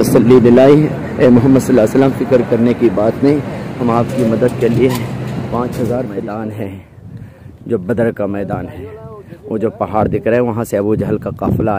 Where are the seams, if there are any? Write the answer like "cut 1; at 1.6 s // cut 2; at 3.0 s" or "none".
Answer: cut 1; at 6.2 s